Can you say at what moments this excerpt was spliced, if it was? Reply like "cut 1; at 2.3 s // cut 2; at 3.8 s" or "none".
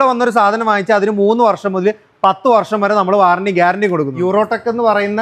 cut 1; at 4.2 s